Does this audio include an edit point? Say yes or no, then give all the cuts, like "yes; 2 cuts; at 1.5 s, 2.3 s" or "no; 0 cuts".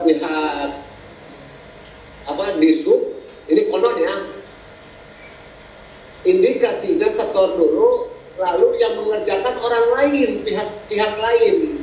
no; 0 cuts